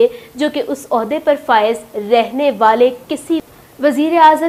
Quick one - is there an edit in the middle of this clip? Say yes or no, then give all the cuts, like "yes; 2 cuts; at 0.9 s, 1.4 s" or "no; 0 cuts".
no; 0 cuts